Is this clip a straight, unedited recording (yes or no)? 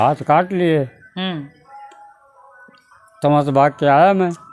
yes